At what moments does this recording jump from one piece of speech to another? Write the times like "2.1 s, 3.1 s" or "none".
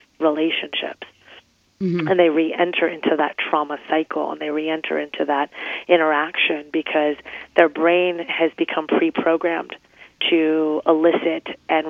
none